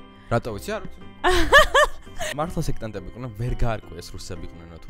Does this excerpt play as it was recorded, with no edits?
no; 1 cut; at 2.3 s

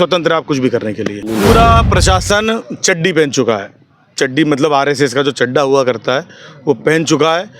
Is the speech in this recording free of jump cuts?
no; 1 cut; at 1.2 s

